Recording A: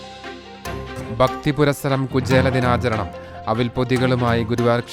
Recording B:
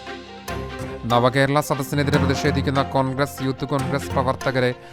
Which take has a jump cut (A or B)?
A